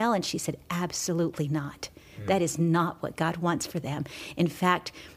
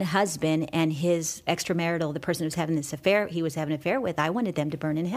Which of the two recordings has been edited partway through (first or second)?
second